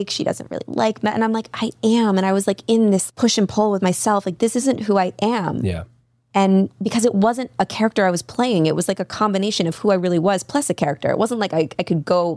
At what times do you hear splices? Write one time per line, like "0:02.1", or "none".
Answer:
0:03.0